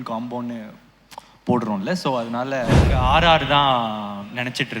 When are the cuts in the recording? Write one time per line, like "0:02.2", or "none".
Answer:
0:02.9